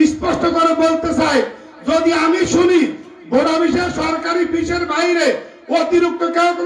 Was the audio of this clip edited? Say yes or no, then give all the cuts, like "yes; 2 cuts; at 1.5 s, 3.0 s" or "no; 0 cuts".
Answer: no; 0 cuts